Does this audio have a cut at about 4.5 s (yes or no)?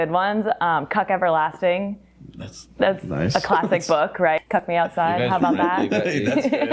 yes